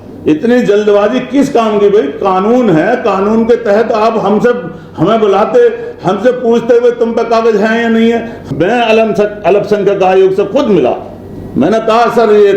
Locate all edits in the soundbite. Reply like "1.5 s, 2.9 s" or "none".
8.4 s